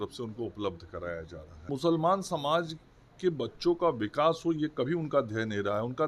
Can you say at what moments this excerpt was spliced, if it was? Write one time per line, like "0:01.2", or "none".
0:01.7